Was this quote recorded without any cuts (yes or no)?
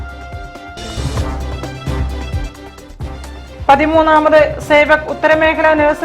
yes